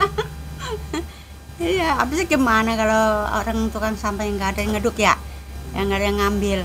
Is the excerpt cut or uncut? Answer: uncut